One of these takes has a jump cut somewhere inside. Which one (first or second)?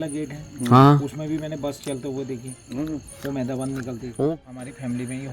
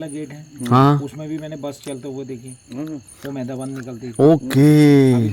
first